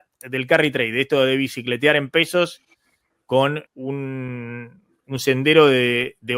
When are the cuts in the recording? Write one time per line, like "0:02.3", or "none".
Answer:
0:03.7